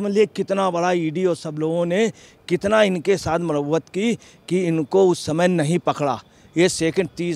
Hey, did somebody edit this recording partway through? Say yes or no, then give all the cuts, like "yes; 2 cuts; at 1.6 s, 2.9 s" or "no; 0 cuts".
no; 0 cuts